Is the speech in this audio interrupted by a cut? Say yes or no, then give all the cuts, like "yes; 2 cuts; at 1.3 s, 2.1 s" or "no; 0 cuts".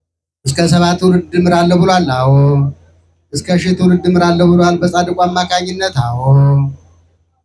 no; 0 cuts